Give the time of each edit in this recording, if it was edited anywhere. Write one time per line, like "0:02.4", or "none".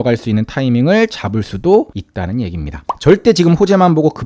0:02.3